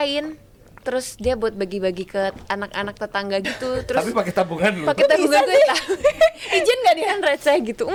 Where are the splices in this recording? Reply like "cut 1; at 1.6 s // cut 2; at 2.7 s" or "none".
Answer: none